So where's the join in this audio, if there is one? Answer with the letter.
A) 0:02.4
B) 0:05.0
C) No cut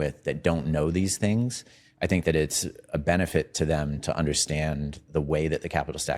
C